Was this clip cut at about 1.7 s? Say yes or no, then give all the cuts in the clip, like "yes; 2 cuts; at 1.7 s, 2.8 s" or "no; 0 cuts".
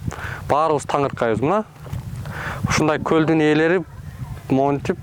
no; 0 cuts